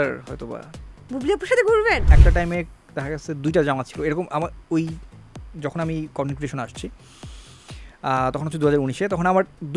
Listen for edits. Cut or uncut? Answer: cut